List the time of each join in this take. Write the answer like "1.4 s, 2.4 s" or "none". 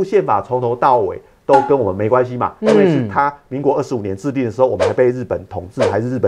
none

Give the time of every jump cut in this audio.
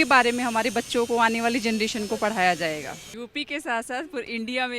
2.9 s

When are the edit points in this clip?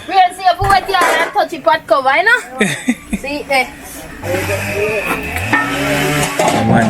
4.1 s

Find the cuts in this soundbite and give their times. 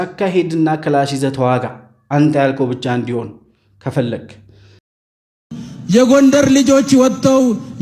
4.9 s

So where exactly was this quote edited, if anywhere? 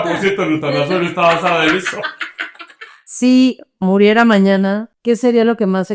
3.0 s, 4.9 s

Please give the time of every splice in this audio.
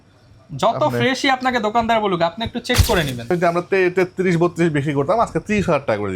3.3 s

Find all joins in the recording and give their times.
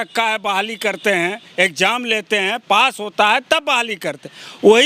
none

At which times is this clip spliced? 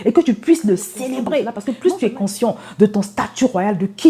1.6 s

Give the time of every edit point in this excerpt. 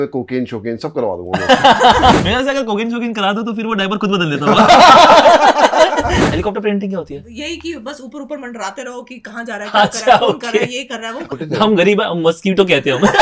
2.1 s, 6.2 s, 11.2 s

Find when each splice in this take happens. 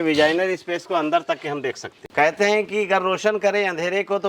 2.0 s

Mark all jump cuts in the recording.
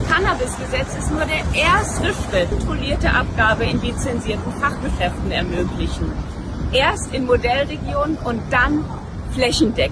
2.6 s

